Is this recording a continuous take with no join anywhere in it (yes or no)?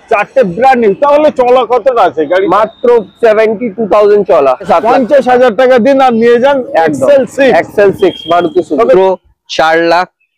no